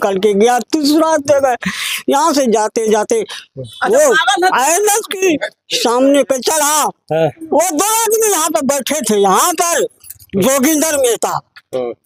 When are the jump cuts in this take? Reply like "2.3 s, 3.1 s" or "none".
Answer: none